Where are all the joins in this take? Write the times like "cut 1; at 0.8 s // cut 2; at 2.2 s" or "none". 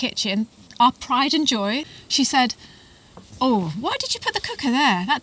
cut 1; at 1.9 s